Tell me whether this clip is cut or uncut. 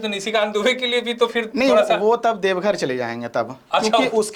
uncut